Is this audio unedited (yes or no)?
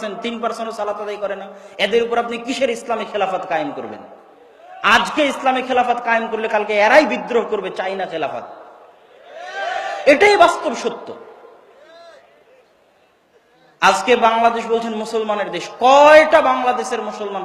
yes